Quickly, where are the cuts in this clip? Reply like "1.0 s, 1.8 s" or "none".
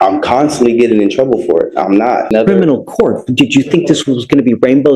2.3 s